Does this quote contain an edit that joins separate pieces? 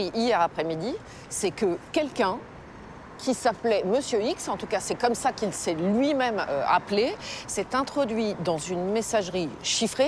no; 0 cuts

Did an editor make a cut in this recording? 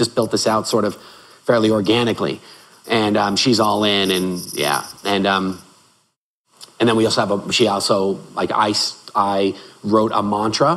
no; 0 cuts

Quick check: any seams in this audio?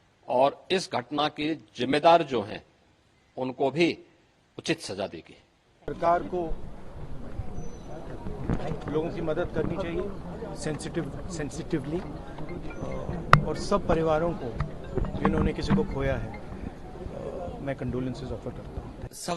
no; 0 cuts

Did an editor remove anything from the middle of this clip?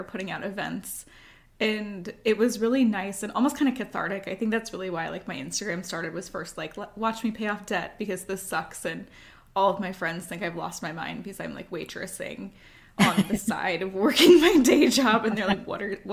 no; 0 cuts

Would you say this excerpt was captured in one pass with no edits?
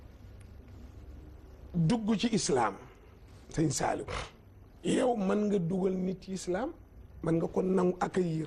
no; 1 cut; at 7.2 s

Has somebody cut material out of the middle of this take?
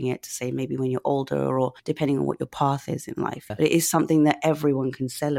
yes; 2 cuts; at 1.8 s, 3.5 s

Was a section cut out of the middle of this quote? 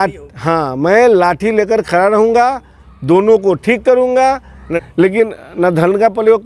yes; 1 cut; at 4.6 s

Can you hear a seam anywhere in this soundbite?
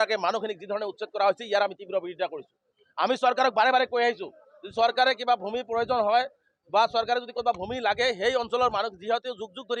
no; 0 cuts

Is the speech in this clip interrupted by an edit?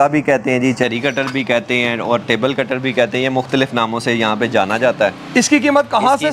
no; 0 cuts

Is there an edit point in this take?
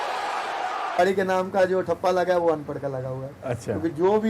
yes; 1 cut; at 1.0 s

